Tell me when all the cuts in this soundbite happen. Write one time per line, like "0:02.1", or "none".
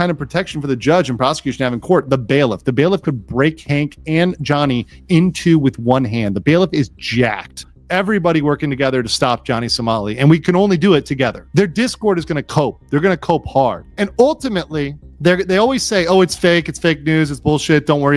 0:07.6
0:11.4
0:13.8
0:15.0